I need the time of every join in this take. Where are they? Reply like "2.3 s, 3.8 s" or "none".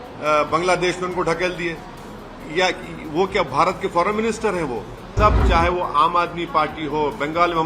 5.1 s